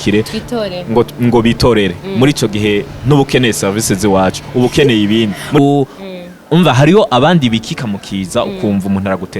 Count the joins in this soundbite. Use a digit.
1